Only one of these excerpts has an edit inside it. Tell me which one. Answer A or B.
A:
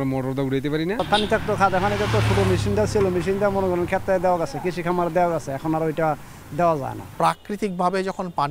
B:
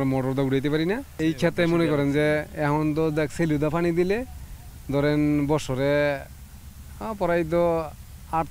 A